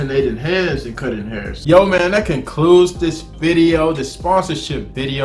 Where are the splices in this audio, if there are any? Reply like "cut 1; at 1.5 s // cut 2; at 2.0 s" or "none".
cut 1; at 1.5 s